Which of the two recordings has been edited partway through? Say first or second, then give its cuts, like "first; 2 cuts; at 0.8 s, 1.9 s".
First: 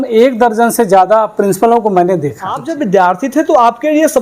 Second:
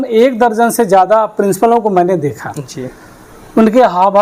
first; 1 cut; at 2.7 s